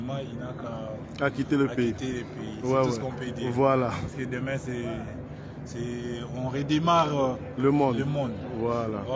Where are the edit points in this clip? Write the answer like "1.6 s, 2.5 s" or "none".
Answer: none